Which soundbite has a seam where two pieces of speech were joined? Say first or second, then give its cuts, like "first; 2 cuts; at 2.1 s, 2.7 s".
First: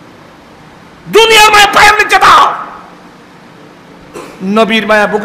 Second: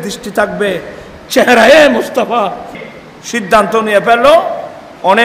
second; 1 cut; at 2.8 s